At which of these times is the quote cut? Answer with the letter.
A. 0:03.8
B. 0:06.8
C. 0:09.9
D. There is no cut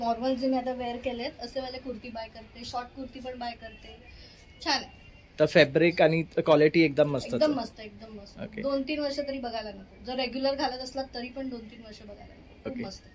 D